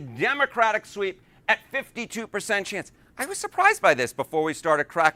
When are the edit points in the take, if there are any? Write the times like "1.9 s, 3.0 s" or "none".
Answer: none